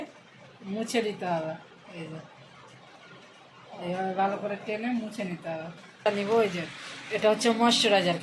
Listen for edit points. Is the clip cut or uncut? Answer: cut